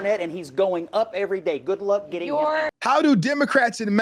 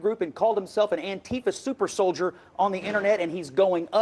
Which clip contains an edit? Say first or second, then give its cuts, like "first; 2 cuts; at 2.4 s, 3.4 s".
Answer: first; 1 cut; at 2.7 s